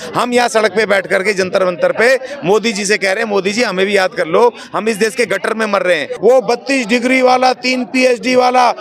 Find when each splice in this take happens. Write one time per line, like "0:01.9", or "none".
0:06.1